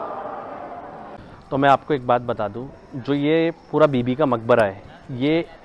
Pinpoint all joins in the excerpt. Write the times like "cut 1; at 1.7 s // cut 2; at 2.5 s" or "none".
cut 1; at 1.1 s